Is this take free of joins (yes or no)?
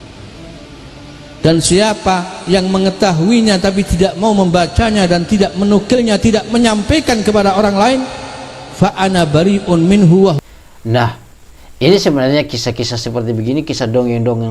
no